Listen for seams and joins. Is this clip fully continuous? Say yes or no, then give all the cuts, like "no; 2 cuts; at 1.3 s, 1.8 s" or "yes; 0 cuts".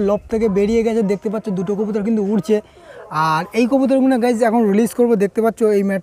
yes; 0 cuts